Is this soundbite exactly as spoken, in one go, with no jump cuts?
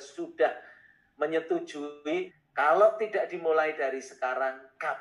no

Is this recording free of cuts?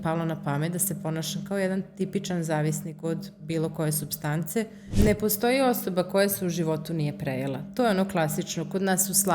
no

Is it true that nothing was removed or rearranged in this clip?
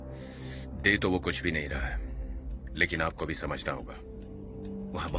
yes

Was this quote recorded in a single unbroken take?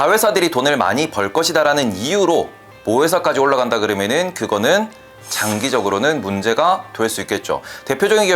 yes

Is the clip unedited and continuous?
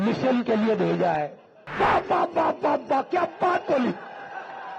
no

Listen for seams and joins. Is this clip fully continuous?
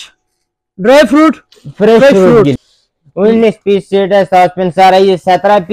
no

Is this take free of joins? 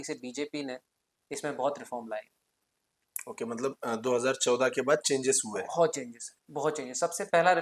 yes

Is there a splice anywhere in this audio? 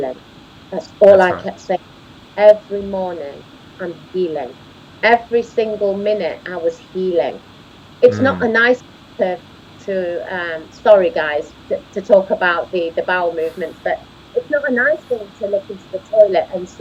no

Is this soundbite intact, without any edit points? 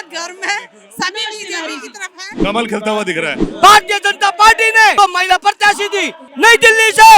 no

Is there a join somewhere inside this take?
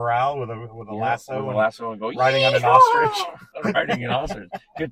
yes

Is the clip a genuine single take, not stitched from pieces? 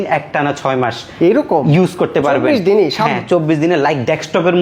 yes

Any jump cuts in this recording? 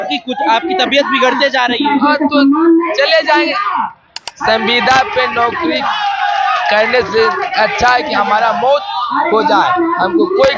no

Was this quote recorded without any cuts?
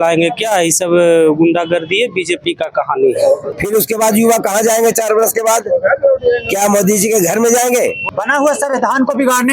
no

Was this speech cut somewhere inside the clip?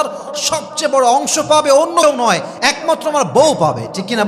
yes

